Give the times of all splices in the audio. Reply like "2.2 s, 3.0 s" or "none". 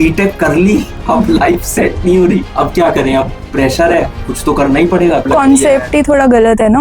0.9 s, 2.5 s, 4.2 s, 5.2 s